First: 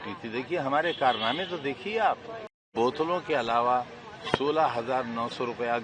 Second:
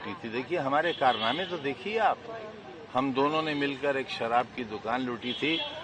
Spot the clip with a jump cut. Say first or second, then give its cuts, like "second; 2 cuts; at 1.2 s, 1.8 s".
first; 1 cut; at 2.7 s